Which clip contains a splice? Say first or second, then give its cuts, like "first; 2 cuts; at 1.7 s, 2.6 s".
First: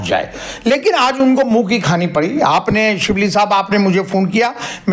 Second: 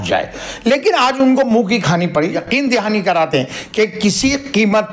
second; 1 cut; at 2.3 s